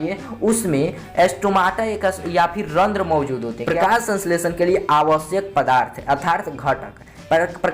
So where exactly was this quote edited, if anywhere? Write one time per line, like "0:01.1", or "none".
0:03.6